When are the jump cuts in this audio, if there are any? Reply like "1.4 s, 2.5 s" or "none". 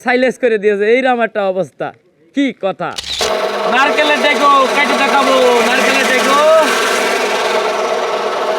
3.1 s